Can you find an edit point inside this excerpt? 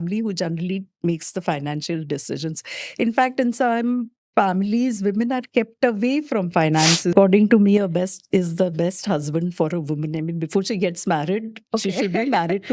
yes; 1 cut; at 7.1 s

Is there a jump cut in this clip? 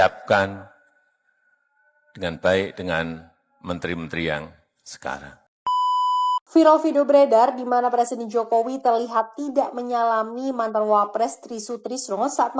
yes; 1 cut; at 5.9 s

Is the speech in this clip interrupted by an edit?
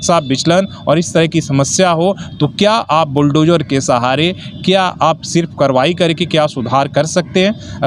no; 0 cuts

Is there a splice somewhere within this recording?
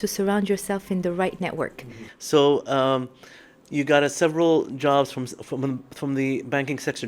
no; 0 cuts

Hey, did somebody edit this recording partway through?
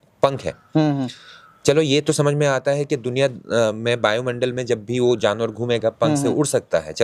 no; 0 cuts

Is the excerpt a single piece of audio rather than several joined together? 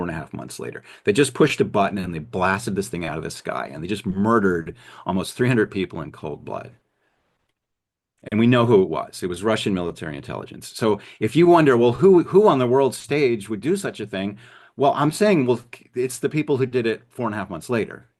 yes; 0 cuts

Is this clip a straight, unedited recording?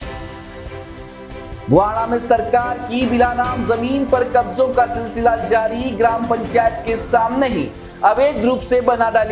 yes; 0 cuts

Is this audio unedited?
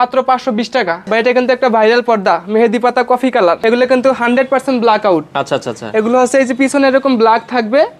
no; 2 cuts; at 1.0 s, 3.6 s

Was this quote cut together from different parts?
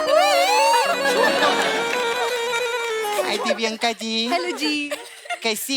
yes; 1 cut; at 3.1 s

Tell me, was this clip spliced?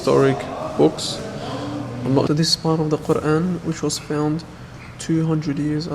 yes; 1 cut; at 2.3 s

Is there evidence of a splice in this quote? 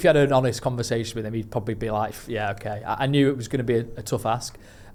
no; 0 cuts

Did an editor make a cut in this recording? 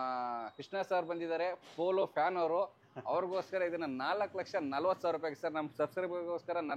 no; 0 cuts

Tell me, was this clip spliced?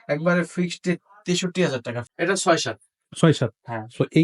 yes; 1 cut; at 2.0 s

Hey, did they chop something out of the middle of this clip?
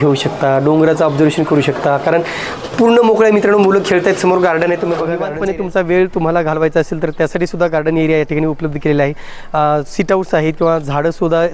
yes; 1 cut; at 5.3 s

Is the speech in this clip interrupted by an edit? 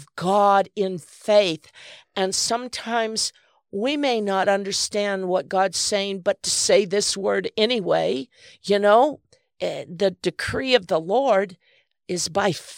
no; 0 cuts

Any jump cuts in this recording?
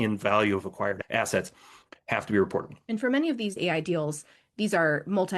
yes; 3 cuts; at 1.0 s, 2.8 s, 3.6 s

